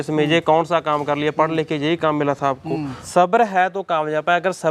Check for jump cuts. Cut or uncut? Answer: cut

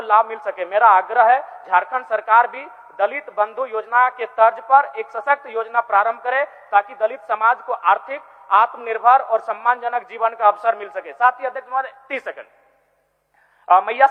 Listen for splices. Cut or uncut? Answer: uncut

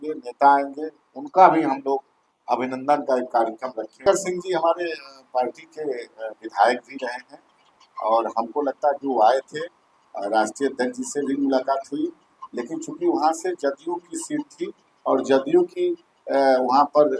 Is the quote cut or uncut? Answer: cut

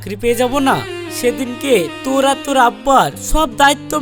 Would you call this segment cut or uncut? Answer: uncut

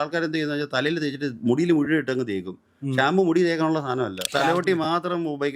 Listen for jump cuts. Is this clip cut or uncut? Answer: cut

